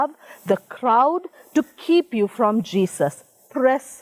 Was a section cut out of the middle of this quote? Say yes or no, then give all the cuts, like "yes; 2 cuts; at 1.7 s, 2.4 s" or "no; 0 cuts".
no; 0 cuts